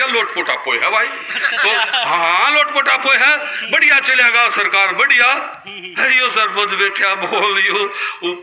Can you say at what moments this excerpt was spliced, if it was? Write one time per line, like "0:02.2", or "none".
none